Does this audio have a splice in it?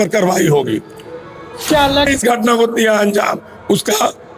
yes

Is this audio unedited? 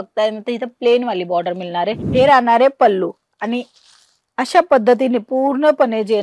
no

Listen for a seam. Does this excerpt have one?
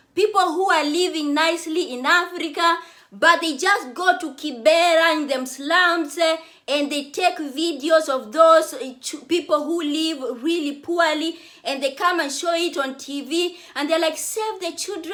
no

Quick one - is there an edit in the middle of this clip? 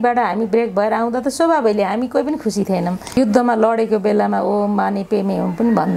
yes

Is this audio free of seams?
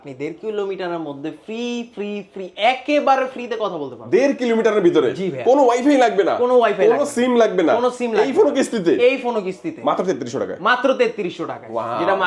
yes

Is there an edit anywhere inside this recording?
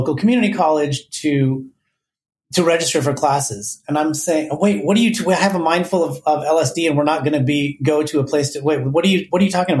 no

